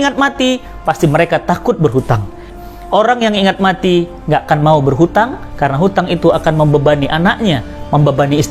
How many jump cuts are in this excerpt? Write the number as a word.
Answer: one